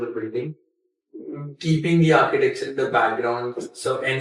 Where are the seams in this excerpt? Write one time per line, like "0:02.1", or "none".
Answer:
none